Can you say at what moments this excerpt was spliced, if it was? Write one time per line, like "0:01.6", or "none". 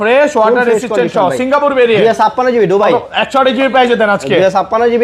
none